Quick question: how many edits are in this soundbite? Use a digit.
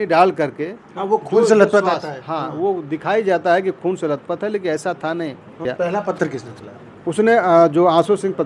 1